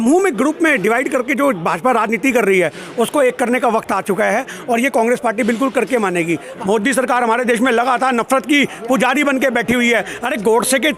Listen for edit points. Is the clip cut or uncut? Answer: cut